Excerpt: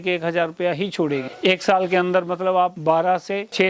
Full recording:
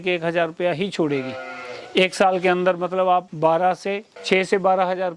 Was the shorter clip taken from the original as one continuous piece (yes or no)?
no